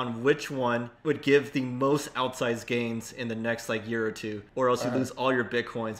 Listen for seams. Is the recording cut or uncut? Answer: cut